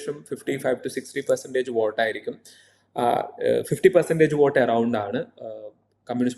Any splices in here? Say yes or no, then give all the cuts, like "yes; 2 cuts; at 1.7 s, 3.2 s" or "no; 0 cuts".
no; 0 cuts